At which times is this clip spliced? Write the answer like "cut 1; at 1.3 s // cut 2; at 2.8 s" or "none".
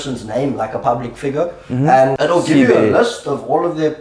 cut 1; at 2.1 s